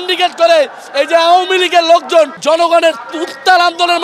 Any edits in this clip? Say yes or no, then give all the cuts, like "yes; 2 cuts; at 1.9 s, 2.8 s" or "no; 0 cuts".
yes; 1 cut; at 2.4 s